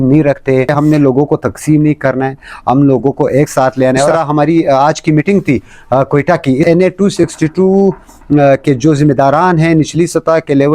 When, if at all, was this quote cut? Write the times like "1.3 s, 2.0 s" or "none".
0.7 s, 4.1 s, 6.6 s